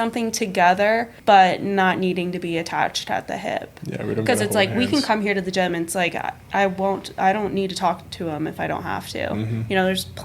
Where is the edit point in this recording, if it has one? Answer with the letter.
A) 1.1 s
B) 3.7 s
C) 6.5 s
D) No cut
A